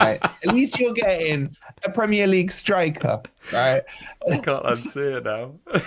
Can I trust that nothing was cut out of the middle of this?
yes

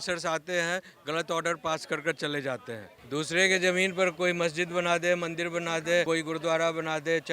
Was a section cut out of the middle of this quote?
yes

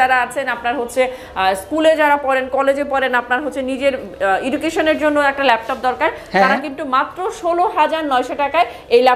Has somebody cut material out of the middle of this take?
no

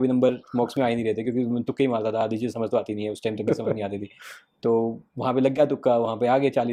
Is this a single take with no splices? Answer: yes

